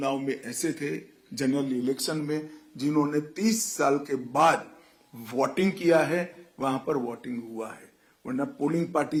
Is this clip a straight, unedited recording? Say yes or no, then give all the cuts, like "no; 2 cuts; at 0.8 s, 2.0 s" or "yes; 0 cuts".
yes; 0 cuts